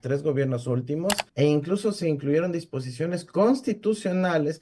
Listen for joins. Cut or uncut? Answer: cut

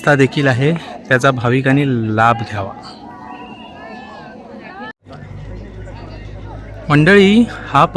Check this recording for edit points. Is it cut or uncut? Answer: uncut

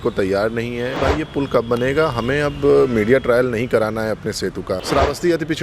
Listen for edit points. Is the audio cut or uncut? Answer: cut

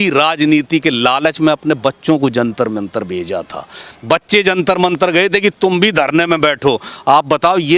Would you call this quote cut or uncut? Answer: uncut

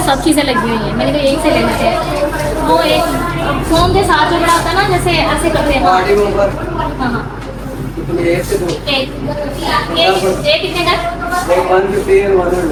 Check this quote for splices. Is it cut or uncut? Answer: uncut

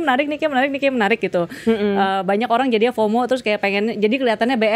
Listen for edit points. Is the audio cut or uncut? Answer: uncut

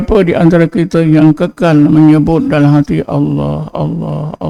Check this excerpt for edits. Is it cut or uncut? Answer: uncut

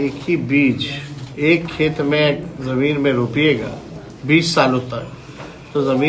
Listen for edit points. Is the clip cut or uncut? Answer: uncut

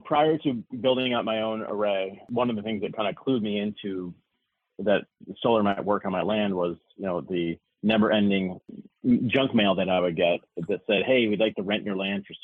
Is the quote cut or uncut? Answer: uncut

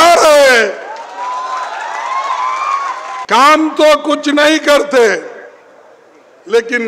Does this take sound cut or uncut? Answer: cut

